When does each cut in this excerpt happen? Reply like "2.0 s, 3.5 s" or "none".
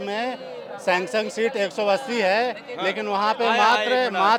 none